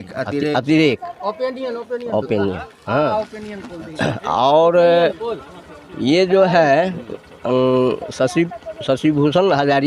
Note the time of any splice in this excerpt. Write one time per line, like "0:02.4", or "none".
none